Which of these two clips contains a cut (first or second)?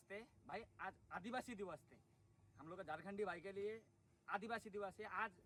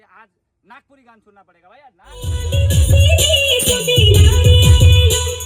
second